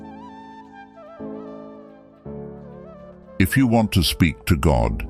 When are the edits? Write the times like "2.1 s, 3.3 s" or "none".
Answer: 0.9 s, 3.2 s